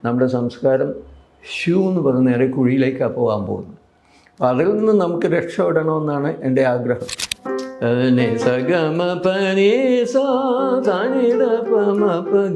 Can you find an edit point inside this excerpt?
yes; 1 cut; at 7.3 s

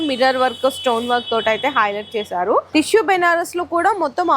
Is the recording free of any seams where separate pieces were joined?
no; 1 cut; at 2.7 s

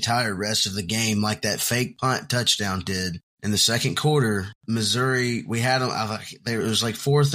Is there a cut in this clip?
yes; 3 cuts; at 1.9 s, 3.3 s, 4.5 s

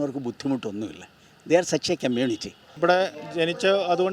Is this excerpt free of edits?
no; 1 cut; at 2.6 s

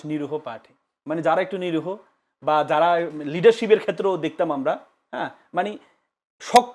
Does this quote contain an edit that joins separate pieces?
no; 0 cuts

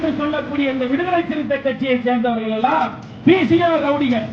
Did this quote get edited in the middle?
yes; 1 cut; at 3.0 s

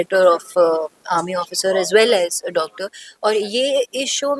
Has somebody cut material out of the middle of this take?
no; 0 cuts

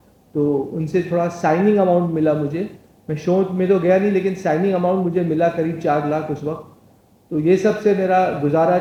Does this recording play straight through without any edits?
yes; 0 cuts

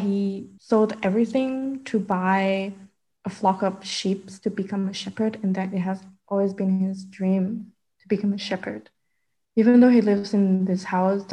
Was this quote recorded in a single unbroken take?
yes; 0 cuts

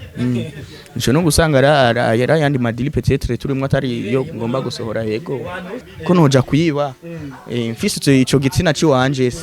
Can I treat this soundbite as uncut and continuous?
no; 1 cut; at 5.9 s

